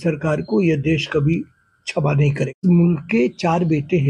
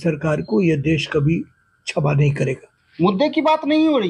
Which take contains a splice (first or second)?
first